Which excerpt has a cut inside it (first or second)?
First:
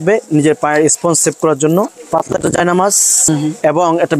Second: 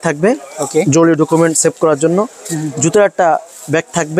first